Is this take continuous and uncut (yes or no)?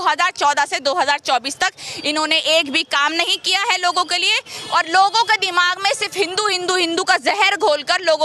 yes